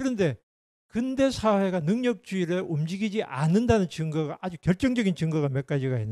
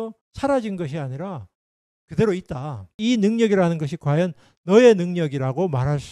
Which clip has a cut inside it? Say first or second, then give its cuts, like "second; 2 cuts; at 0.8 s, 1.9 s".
second; 1 cut; at 3.0 s